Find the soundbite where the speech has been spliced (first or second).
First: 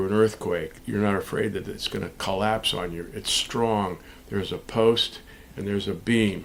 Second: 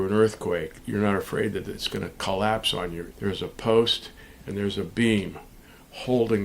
second